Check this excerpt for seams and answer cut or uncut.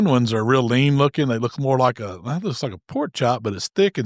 uncut